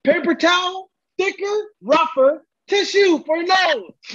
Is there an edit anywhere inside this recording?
no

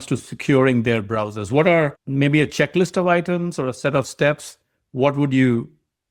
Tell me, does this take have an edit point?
no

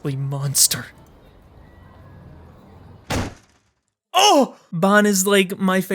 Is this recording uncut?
no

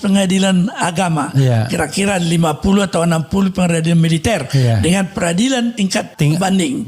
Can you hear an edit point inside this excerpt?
yes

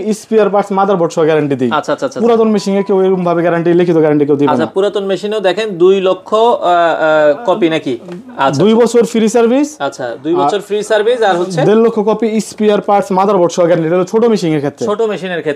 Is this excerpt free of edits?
yes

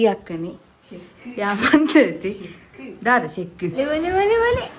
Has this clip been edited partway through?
yes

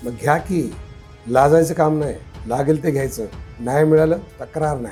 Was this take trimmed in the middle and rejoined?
no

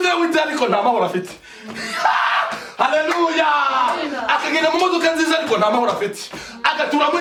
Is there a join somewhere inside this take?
no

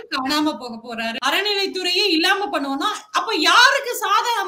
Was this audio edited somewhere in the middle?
yes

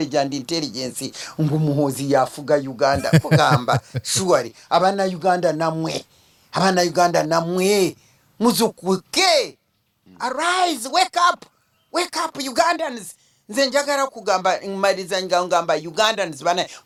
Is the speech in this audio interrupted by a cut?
no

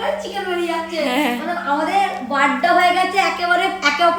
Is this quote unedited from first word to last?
yes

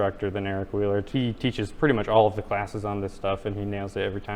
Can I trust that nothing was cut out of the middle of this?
no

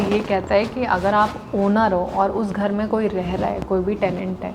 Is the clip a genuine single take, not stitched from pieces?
yes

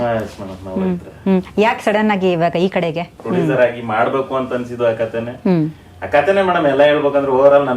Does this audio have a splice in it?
yes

